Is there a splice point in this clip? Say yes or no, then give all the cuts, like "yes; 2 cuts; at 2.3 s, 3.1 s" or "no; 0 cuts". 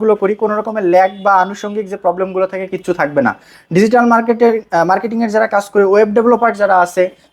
no; 0 cuts